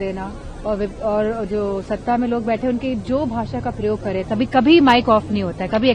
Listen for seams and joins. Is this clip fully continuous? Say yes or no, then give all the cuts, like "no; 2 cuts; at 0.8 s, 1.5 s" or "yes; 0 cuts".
yes; 0 cuts